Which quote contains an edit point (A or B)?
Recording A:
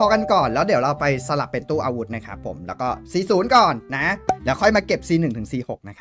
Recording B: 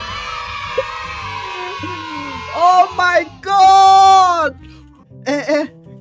A